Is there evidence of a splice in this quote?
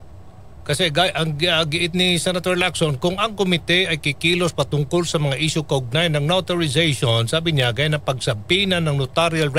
yes; 1 cut; at 3.1 s

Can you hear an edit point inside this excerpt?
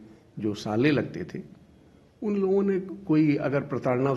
no; 0 cuts

